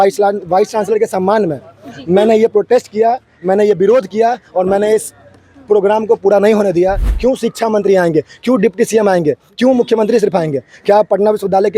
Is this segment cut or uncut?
cut